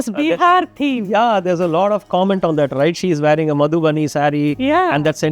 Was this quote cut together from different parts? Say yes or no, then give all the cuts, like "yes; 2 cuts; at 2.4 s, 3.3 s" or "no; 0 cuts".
no; 0 cuts